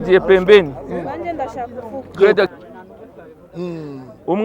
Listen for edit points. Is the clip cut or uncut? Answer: cut